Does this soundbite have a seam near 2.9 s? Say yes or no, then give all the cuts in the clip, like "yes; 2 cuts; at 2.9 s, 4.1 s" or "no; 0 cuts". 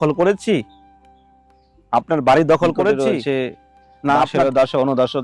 yes; 1 cut; at 2.9 s